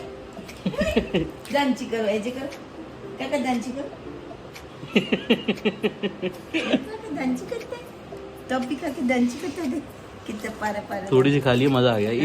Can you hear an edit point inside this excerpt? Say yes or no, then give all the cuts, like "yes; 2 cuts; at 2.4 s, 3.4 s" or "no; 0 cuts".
no; 0 cuts